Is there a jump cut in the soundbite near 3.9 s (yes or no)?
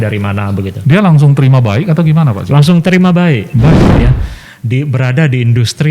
yes